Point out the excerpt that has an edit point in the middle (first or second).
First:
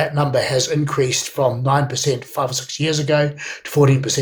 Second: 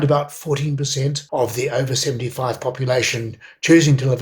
second